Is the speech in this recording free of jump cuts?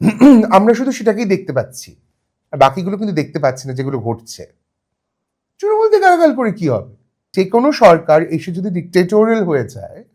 no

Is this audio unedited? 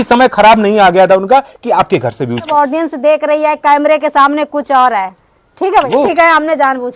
no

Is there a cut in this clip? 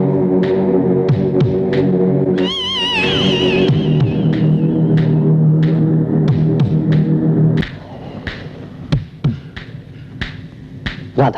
yes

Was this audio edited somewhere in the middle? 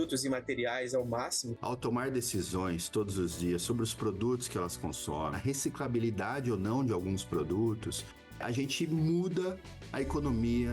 yes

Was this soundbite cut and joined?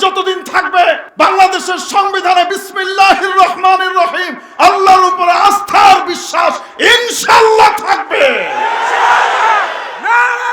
yes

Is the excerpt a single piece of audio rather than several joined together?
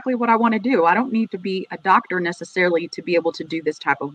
yes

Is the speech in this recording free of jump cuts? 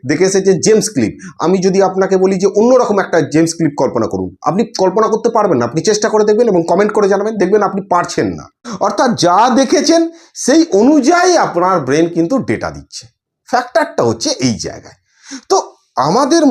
yes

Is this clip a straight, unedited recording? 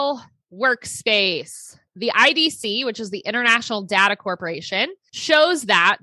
no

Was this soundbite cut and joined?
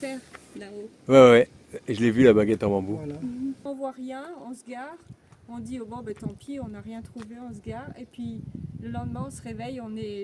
yes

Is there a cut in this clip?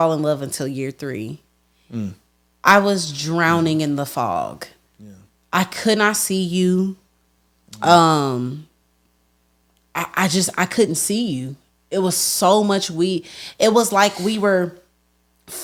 no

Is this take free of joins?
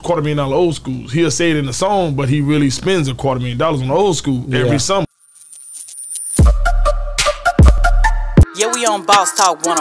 no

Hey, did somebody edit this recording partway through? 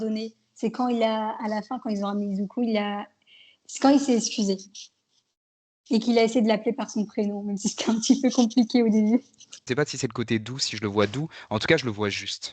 yes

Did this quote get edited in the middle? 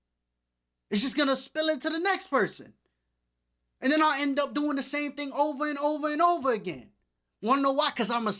no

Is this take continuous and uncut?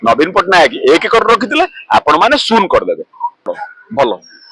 no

